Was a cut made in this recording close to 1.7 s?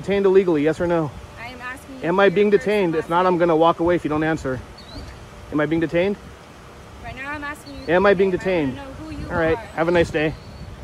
no; 0 cuts

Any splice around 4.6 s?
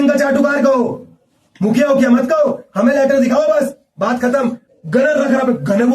yes; 1 cut; at 4.6 s

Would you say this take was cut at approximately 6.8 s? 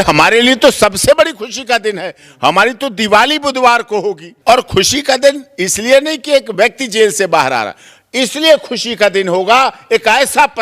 no; 1 cut; at 4.3 s

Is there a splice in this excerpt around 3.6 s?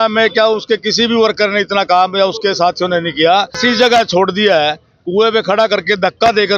yes; 1 cut; at 3.6 s

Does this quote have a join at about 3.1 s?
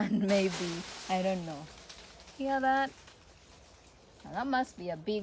no; 0 cuts

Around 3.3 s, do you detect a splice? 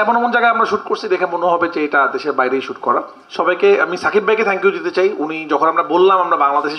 no; 0 cuts

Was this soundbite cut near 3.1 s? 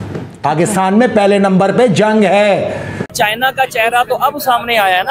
yes; 1 cut; at 3.1 s

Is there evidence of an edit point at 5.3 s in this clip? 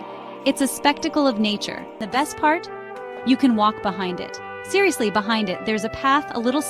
no; 1 cut; at 2.1 s

